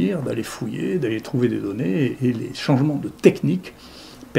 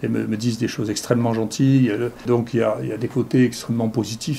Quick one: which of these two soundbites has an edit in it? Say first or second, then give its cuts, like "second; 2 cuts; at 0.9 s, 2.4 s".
second; 1 cut; at 2.2 s